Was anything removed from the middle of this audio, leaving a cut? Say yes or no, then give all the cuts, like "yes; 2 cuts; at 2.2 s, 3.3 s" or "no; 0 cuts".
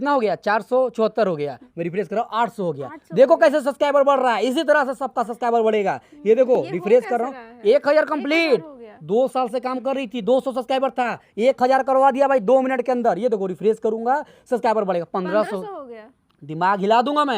yes; 1 cut; at 1.6 s